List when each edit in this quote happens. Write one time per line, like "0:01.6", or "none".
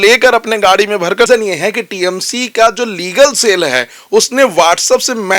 0:01.3